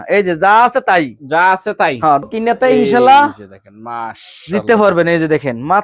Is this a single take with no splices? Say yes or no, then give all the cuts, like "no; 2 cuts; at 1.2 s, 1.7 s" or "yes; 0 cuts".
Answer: no; 1 cut; at 2.3 s